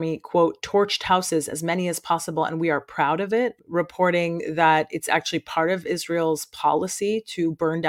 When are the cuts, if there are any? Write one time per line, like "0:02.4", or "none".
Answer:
0:03.6